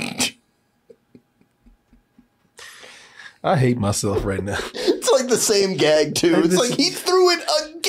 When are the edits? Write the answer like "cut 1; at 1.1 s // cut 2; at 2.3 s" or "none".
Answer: none

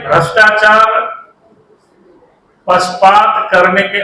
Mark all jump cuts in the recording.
none

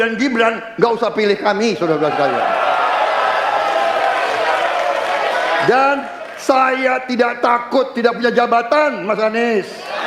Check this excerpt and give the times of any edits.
none

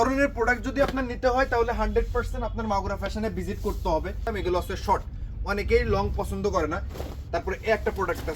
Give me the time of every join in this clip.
cut 1; at 4.2 s

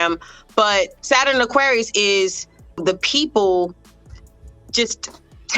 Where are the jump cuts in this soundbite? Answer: cut 1; at 1.0 s // cut 2; at 2.8 s

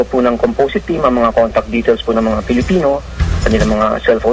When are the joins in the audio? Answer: none

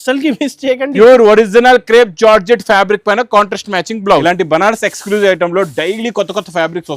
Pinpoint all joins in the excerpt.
cut 1; at 4.2 s

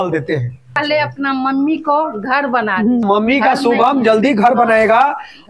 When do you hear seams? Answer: cut 1; at 0.8 s // cut 2; at 3.0 s

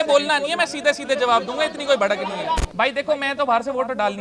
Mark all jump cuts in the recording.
cut 1; at 2.7 s

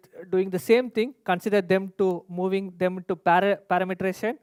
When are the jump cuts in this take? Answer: none

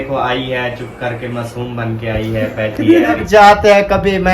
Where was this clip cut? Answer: cut 1; at 3.2 s

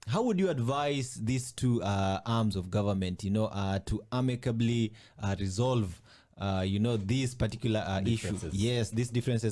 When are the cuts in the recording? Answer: none

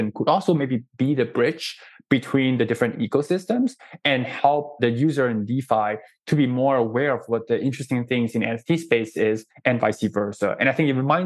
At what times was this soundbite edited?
cut 1; at 4.8 s

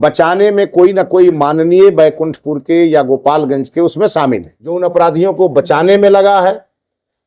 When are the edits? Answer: cut 1; at 4.8 s

